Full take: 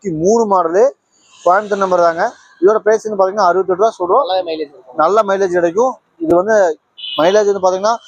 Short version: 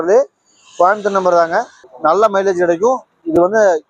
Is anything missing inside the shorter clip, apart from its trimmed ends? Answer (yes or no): yes